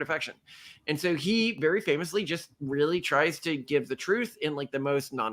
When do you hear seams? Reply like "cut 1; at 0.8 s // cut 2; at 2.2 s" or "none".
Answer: none

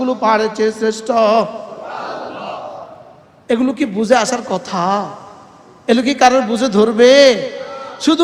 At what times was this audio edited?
none

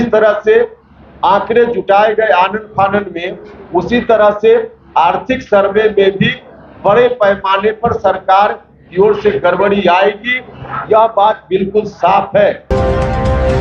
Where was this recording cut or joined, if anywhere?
cut 1; at 12.7 s

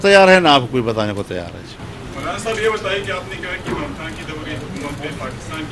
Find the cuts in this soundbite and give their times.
none

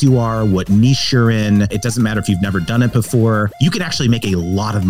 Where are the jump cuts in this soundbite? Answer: cut 1; at 1.7 s // cut 2; at 3.5 s

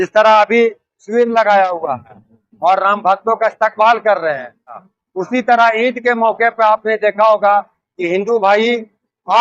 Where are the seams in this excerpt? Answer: cut 1; at 4.8 s

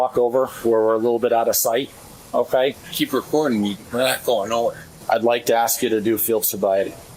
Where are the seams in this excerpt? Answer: cut 1; at 2.9 s // cut 2; at 4.9 s

